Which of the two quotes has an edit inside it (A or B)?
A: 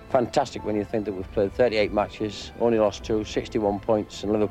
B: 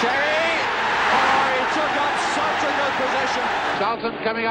B